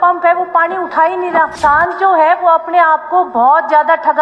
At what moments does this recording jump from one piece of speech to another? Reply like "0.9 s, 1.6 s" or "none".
1.5 s